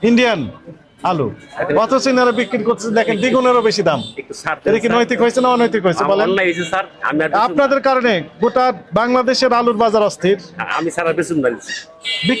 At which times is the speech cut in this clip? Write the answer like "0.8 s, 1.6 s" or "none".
none